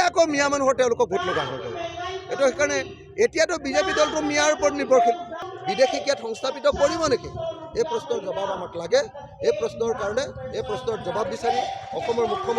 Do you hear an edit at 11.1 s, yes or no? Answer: no